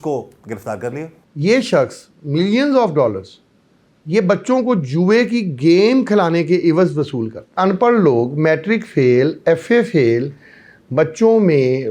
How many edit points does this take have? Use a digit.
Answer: 2